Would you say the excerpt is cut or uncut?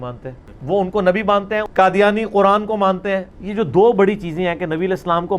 cut